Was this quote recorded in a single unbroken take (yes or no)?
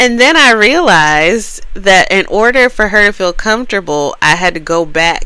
yes